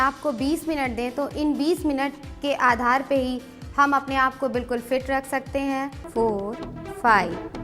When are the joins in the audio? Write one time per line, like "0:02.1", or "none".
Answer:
0:06.0